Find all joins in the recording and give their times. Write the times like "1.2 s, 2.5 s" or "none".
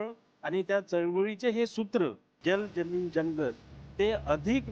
none